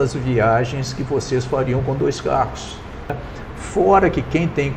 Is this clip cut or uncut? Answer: cut